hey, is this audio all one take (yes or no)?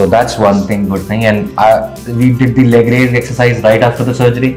yes